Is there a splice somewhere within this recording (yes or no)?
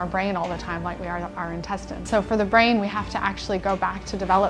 yes